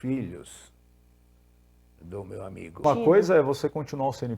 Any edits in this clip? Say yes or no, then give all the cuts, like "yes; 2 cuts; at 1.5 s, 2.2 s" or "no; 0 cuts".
yes; 1 cut; at 2.8 s